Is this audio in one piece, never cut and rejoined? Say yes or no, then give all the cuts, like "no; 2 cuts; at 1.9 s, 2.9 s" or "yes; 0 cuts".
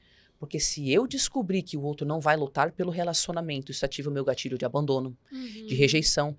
yes; 0 cuts